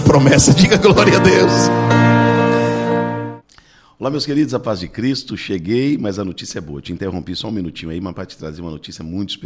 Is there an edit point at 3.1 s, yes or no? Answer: yes